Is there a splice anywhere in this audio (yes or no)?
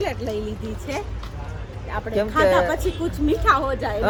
no